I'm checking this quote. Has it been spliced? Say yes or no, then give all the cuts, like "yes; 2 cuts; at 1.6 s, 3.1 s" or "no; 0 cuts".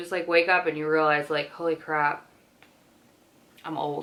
no; 0 cuts